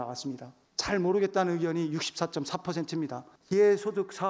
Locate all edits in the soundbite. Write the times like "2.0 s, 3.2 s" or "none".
3.3 s